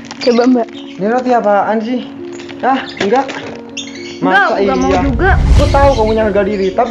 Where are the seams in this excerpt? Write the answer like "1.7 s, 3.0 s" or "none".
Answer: 5.5 s